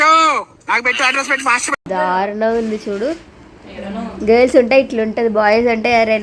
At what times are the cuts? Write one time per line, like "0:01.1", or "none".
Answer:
0:01.7